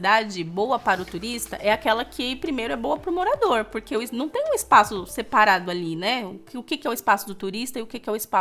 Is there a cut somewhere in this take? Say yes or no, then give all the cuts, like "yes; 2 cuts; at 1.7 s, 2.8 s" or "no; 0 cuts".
no; 0 cuts